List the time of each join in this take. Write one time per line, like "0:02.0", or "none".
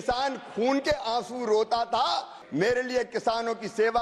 0:02.4

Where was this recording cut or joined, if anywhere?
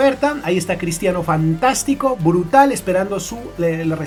none

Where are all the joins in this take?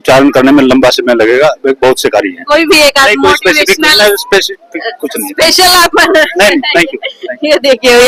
none

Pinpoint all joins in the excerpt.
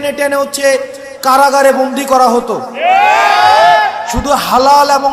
none

